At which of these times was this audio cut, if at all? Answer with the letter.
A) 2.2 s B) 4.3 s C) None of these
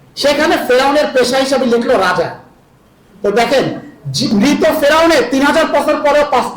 C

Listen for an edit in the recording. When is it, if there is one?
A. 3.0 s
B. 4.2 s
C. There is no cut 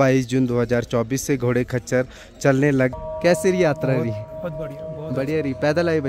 A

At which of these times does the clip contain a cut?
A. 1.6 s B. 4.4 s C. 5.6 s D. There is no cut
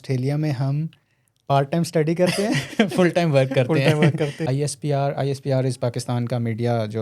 B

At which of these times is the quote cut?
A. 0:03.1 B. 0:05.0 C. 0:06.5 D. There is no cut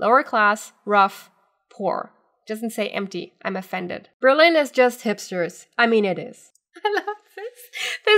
C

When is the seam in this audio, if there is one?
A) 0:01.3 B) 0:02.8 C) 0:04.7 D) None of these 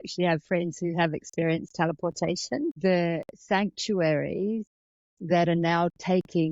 B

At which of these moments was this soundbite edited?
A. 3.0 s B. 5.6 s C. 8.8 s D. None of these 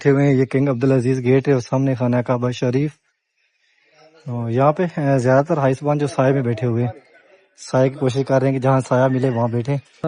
D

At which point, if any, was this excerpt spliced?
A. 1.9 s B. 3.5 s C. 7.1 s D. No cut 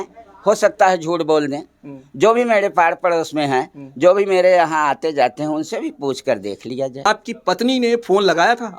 C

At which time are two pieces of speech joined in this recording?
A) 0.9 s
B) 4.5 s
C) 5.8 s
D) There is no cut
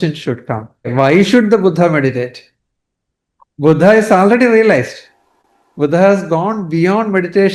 A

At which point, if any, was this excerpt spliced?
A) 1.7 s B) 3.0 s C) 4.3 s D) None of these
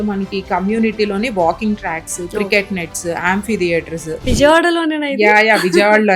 C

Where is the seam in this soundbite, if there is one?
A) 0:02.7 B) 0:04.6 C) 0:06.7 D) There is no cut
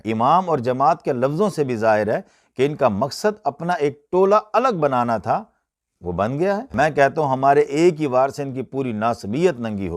C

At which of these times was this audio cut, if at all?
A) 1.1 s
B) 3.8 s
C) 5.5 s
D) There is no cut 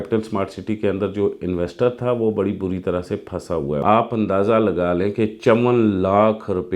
B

